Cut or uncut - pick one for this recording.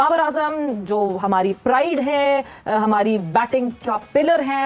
uncut